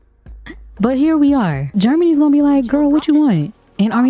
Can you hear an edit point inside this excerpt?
yes; 1 cut; at 1.7 s

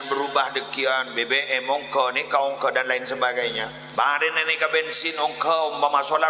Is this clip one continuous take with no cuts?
no; 1 cut; at 3.7 s

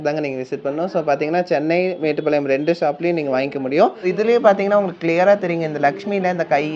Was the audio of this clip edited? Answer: yes; 1 cut; at 4.0 s

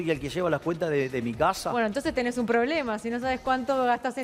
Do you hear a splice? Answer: no; 0 cuts

